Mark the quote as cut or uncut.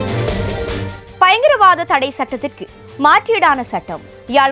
cut